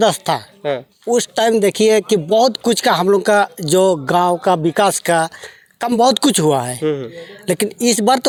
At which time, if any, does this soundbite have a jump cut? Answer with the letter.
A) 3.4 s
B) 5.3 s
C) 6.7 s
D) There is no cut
D